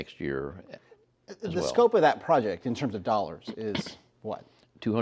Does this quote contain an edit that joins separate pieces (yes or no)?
yes